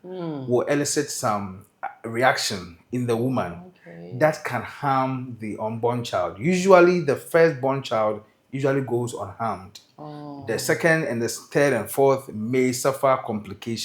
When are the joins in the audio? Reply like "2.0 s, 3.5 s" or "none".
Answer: none

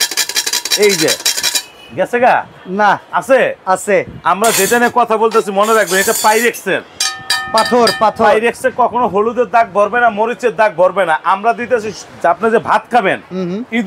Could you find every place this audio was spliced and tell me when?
none

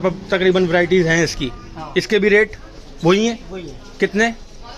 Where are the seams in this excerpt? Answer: none

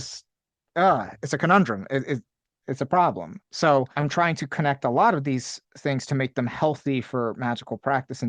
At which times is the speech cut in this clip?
3.9 s

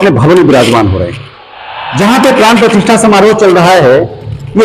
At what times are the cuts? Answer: none

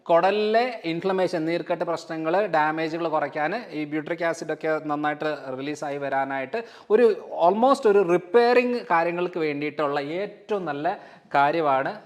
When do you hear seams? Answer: none

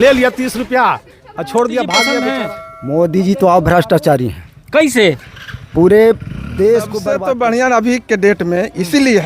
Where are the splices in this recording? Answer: 2.3 s, 7.0 s

